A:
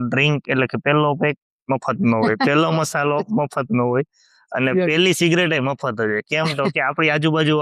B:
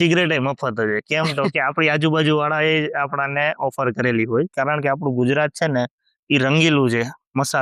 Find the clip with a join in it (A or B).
B